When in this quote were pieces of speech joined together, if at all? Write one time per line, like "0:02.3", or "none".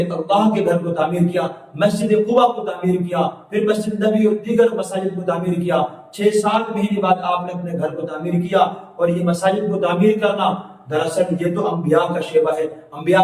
none